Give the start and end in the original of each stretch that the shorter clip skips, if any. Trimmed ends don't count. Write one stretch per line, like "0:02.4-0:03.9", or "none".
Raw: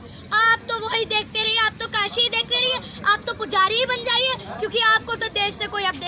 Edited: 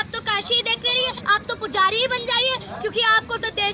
0:02.9-0:03.0